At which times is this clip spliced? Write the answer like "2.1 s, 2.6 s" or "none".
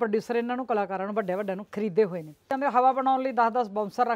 2.5 s